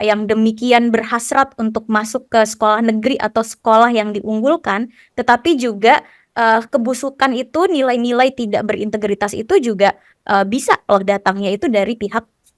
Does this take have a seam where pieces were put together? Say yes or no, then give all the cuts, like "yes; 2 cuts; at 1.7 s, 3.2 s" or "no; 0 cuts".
no; 0 cuts